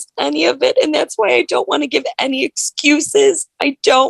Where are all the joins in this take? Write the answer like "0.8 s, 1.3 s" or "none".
none